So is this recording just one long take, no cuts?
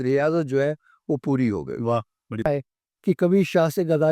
no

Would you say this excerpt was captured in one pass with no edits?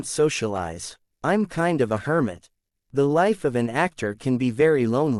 yes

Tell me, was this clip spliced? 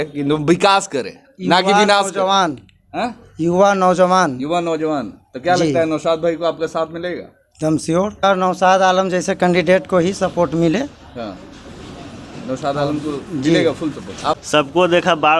yes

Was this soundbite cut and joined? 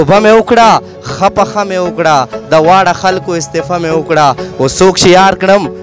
no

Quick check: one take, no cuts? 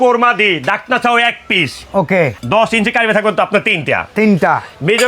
no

